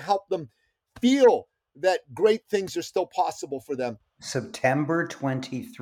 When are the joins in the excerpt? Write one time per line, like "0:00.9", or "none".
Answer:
0:04.0